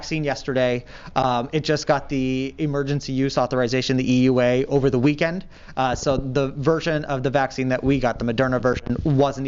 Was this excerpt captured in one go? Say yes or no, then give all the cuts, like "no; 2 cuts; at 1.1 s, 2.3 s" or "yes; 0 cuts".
yes; 0 cuts